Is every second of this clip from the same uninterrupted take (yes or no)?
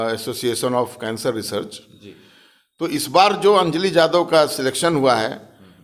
yes